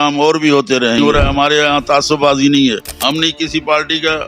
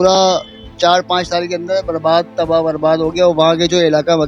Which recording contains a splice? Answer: first; 2 cuts; at 1.0 s, 2.9 s

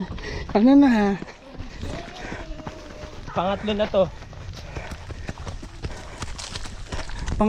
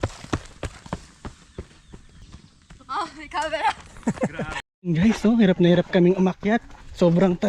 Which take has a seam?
second; 2 cuts; at 2.1 s, 4.6 s

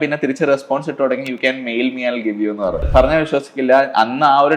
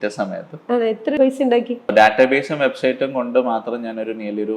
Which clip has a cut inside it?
first; 1 cut; at 2.8 s

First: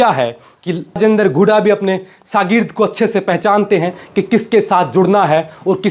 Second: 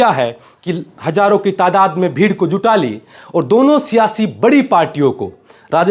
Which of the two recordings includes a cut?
first; 1 cut; at 1.0 s

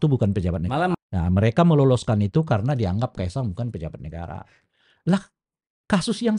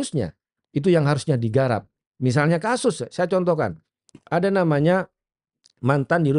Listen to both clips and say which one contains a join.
first; 1 cut; at 0.9 s

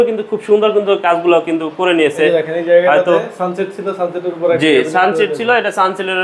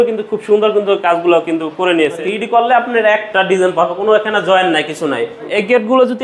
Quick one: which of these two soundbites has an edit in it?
second; 2 cuts; at 2.2 s, 5.5 s

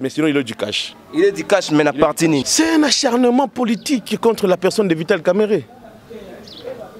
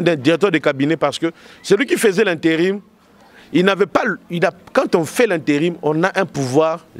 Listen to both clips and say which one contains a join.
first; 1 cut; at 2.5 s

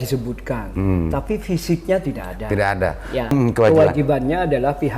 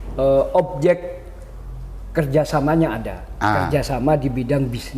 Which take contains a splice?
first; 1 cut; at 3.3 s

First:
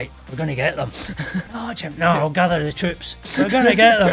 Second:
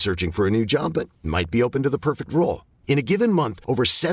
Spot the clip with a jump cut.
first; 1 cut; at 1.5 s

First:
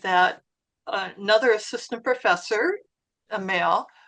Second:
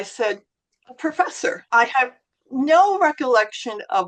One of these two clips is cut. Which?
second; 1 cut; at 1.6 s

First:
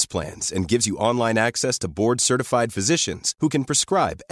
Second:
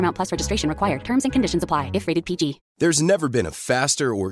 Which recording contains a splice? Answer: second; 1 cut; at 2.6 s

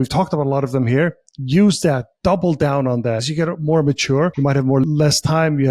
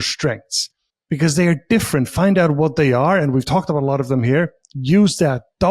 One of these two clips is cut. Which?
first; 2 cuts; at 3.3 s, 4.8 s

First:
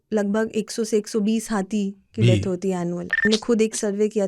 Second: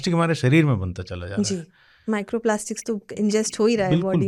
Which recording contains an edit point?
first; 1 cut; at 3.2 s

